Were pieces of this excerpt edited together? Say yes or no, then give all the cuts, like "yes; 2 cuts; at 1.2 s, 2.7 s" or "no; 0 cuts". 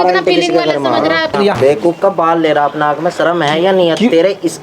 yes; 1 cut; at 1.3 s